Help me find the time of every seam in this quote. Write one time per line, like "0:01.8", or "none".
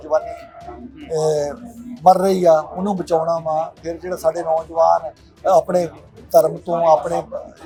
none